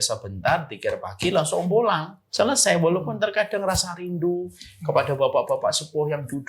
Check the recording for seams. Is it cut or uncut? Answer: cut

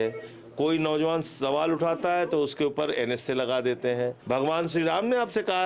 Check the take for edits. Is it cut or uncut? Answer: cut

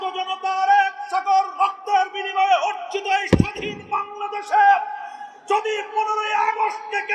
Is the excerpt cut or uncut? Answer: uncut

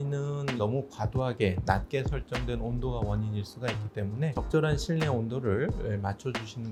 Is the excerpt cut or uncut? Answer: uncut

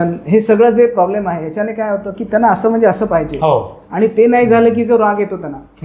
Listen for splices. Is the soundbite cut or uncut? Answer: uncut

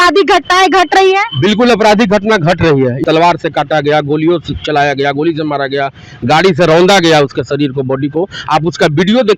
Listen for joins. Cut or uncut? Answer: cut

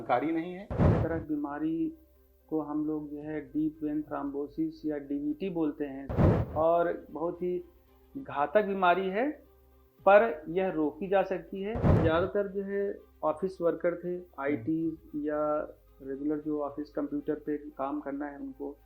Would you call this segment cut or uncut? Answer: cut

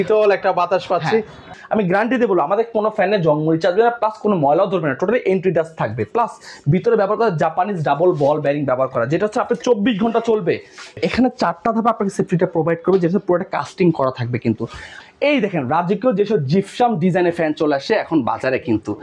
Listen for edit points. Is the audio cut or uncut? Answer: cut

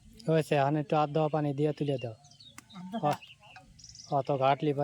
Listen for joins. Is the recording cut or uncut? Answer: uncut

